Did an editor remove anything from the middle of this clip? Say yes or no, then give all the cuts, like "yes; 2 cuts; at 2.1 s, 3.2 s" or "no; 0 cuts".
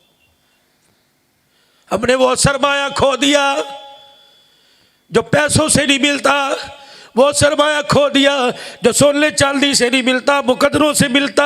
no; 0 cuts